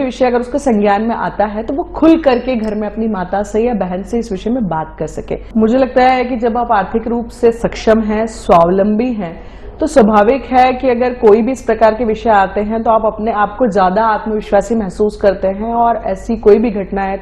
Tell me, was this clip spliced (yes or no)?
yes